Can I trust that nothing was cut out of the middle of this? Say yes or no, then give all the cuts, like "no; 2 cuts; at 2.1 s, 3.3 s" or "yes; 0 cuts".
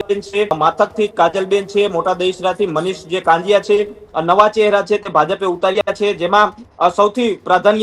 no; 1 cut; at 4.0 s